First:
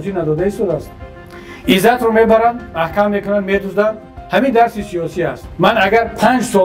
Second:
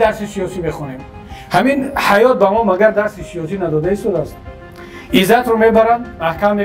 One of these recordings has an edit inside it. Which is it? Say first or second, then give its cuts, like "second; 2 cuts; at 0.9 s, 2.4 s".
first; 1 cut; at 5.4 s